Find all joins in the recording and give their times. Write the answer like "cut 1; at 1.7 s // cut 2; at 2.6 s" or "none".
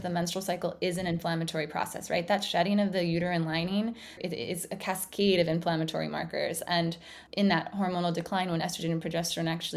cut 1; at 4.2 s // cut 2; at 7.2 s